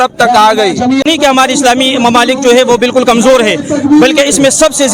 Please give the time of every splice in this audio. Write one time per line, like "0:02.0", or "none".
0:01.0